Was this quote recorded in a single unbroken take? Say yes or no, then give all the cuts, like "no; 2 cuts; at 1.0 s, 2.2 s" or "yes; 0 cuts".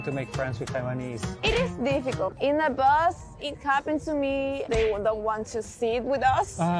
no; 3 cuts; at 1.3 s, 2.3 s, 4.7 s